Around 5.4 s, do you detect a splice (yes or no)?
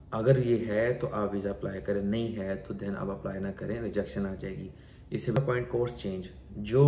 yes